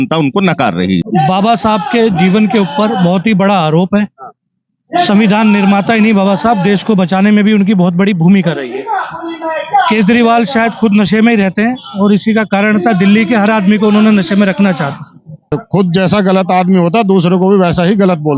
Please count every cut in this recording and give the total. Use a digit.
2